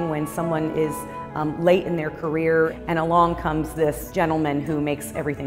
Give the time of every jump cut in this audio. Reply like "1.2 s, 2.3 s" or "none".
2.7 s, 4.0 s